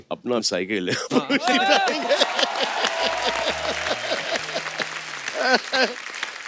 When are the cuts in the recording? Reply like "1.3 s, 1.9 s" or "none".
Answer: none